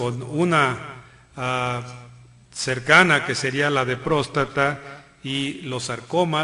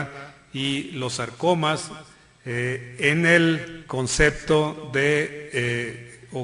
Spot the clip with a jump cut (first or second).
first